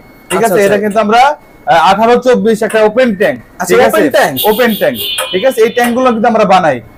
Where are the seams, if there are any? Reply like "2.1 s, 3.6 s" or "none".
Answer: none